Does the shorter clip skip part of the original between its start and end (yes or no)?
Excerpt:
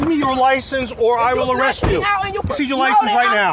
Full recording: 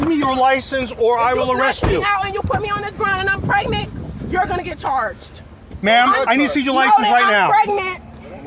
yes